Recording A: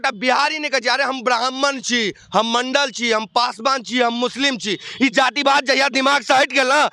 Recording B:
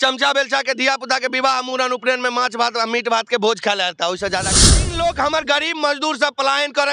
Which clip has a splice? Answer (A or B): B